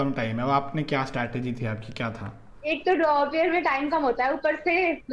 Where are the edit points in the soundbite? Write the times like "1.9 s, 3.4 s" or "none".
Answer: none